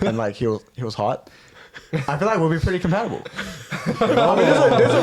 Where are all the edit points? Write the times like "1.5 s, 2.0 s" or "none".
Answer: none